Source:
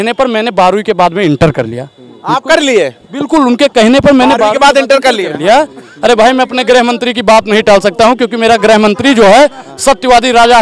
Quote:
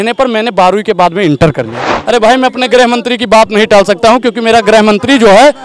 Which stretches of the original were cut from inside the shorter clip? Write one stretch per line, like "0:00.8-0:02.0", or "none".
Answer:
0:01.9-0:05.9